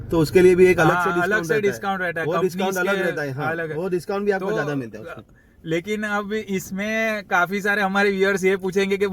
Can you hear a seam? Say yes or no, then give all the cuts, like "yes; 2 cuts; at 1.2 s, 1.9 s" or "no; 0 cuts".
no; 0 cuts